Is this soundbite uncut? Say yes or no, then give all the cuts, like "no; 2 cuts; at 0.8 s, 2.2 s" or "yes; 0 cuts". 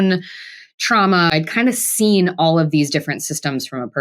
no; 1 cut; at 1.3 s